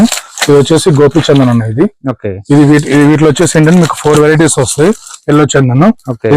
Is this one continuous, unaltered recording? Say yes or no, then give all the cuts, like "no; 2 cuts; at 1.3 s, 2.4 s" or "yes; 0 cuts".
yes; 0 cuts